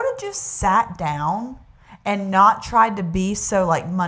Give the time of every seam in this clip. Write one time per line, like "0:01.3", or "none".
none

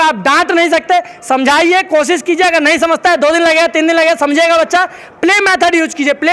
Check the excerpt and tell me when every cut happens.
none

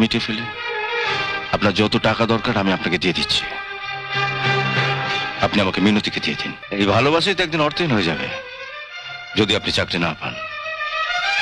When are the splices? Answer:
0:06.5

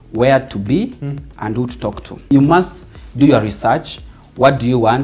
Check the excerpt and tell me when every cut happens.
0:02.3

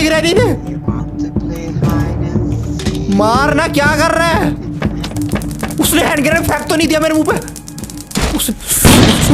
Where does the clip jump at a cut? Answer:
none

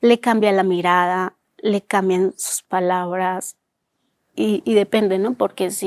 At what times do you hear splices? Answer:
none

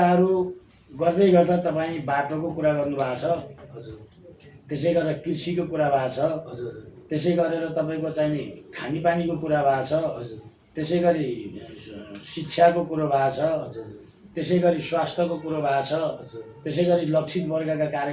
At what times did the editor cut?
none

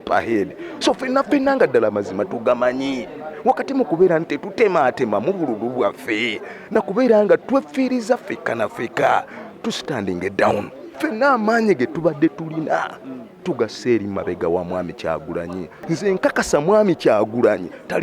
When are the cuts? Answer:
0:15.7

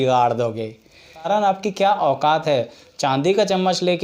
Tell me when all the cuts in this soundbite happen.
0:01.3

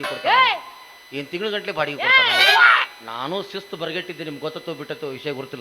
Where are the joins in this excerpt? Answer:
none

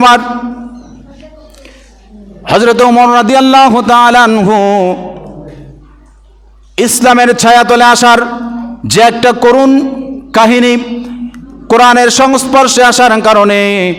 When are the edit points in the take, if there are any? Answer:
none

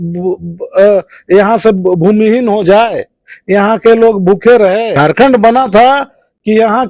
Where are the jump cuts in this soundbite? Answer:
0:04.9

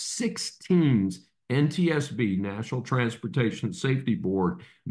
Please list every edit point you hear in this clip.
none

